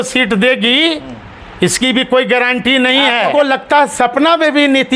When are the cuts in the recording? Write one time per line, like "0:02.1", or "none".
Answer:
0:03.3